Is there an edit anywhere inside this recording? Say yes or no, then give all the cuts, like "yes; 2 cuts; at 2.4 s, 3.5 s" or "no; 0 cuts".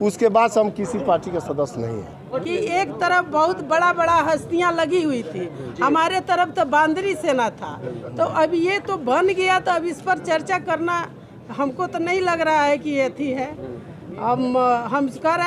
yes; 1 cut; at 2.3 s